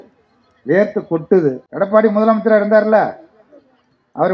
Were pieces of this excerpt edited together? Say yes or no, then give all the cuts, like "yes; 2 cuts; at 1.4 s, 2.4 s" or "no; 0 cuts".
yes; 1 cut; at 1.6 s